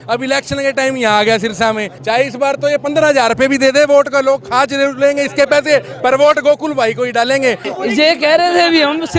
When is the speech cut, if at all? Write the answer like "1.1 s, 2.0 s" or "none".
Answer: 1.9 s, 7.7 s